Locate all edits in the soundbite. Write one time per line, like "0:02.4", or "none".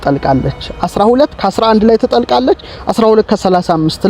none